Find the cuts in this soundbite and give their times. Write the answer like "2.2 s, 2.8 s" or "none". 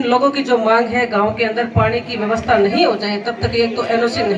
none